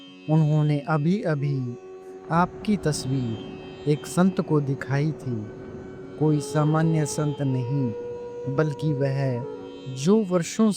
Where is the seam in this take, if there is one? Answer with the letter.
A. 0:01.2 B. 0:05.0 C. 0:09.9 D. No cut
D